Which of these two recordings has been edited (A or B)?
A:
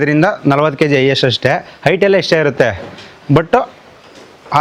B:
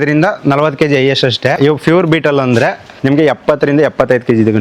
B